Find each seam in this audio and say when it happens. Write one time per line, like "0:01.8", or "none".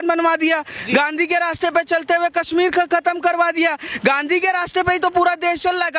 none